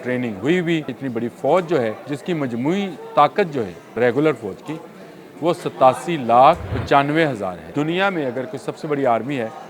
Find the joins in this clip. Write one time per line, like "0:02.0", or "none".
0:01.0
0:02.1
0:03.9
0:06.7
0:07.6